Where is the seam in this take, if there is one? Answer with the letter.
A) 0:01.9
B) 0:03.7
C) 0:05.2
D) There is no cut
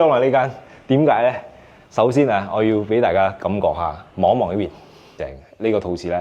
C